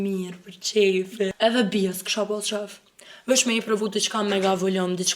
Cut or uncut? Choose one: cut